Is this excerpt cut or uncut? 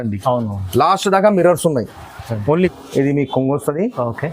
cut